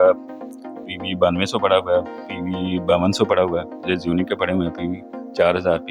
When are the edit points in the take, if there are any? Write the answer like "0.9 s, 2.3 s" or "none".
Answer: none

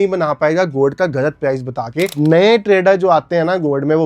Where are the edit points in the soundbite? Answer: 2.1 s

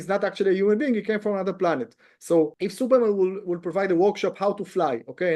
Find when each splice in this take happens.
2.5 s

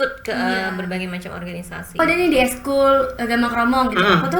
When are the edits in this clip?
2.0 s

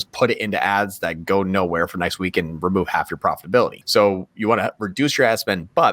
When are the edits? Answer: 3.8 s

